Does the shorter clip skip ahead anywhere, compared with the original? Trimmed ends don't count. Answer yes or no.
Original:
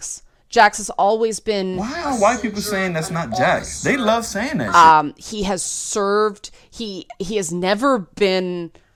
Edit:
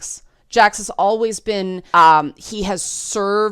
yes